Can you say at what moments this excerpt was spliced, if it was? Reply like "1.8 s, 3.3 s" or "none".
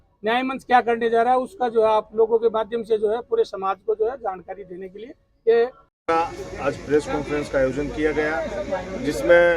5.9 s